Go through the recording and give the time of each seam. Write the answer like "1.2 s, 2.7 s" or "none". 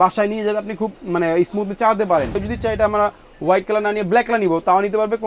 2.4 s